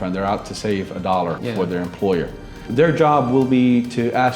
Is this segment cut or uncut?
cut